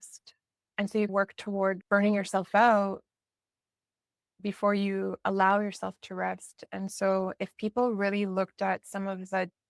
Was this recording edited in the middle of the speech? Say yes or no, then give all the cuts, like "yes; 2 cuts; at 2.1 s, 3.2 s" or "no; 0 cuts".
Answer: no; 0 cuts